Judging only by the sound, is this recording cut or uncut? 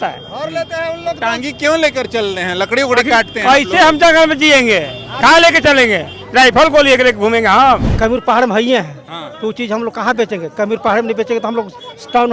cut